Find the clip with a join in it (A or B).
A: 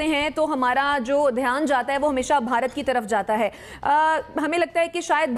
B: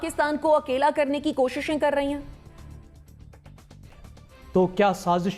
B